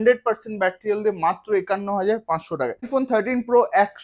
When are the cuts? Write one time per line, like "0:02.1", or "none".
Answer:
0:02.9